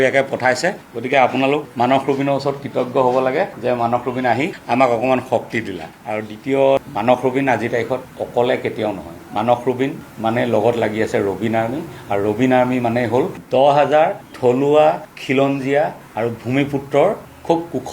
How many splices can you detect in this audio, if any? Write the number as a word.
one